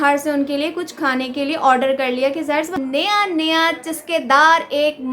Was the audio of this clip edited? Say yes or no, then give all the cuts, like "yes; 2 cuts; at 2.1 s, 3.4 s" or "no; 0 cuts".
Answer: yes; 1 cut; at 2.8 s